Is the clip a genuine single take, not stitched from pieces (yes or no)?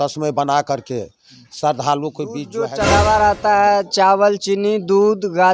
no